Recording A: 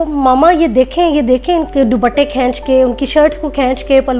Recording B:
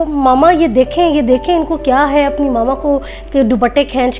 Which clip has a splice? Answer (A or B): A